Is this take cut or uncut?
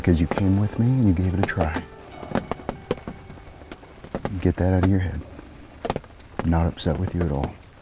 uncut